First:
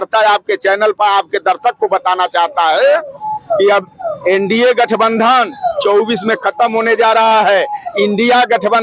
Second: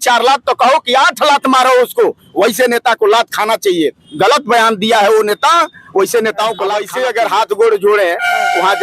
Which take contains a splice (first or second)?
second